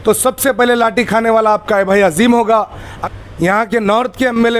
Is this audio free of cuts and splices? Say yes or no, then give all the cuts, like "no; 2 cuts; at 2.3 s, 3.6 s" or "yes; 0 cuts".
no; 1 cut; at 2.9 s